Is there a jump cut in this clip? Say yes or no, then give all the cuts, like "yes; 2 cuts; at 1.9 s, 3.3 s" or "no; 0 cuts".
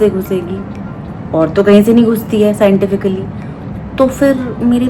no; 0 cuts